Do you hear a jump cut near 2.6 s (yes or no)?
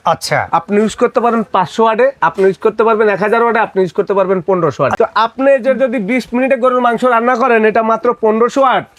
no